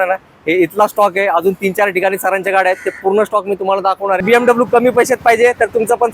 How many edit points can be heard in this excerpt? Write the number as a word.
one